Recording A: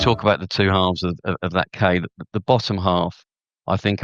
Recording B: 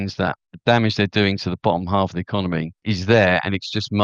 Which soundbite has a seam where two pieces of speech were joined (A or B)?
B